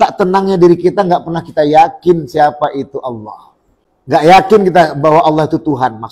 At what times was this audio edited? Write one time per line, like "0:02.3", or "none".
0:04.3